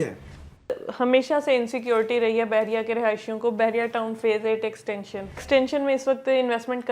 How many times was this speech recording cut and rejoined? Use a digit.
2